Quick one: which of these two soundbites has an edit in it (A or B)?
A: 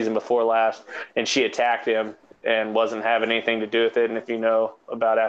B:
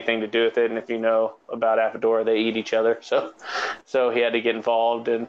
A